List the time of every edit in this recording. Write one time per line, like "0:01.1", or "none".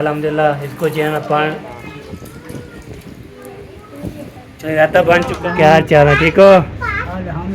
0:01.7
0:05.4